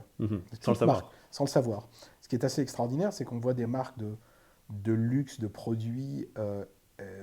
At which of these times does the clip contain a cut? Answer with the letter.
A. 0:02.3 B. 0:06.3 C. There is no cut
C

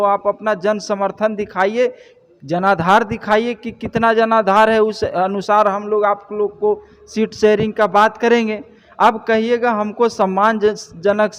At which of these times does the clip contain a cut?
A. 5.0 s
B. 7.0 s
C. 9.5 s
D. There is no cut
D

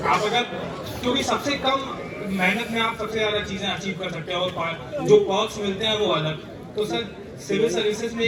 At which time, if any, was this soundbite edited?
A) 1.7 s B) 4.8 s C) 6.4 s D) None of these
D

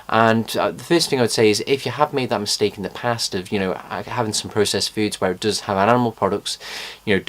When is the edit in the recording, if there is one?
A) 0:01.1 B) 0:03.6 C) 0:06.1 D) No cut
C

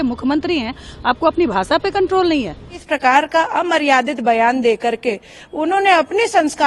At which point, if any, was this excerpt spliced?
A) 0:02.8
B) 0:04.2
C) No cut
A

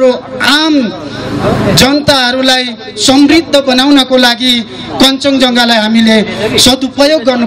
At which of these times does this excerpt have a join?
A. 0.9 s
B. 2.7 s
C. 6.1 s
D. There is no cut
D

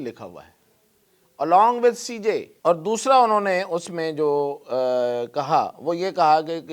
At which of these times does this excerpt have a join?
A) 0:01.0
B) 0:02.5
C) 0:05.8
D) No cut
B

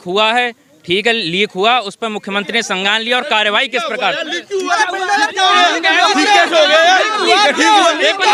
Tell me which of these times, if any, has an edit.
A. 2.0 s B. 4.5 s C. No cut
C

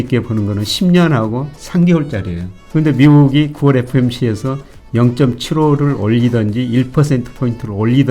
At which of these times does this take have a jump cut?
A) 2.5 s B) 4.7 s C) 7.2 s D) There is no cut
A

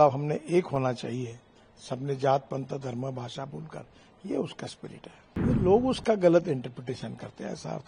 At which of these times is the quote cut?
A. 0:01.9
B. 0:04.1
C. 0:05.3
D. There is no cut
C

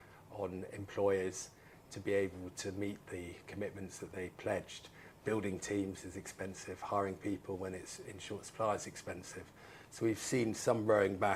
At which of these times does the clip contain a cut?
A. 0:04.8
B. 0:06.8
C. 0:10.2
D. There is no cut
D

